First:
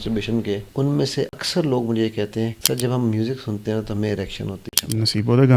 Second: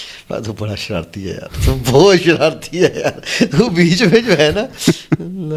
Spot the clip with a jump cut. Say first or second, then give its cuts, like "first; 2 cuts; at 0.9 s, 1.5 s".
first; 3 cuts; at 1.0 s, 2.6 s, 4.7 s